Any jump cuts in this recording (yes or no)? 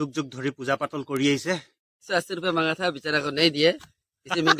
yes